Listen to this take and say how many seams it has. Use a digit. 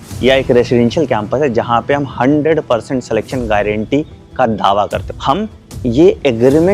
1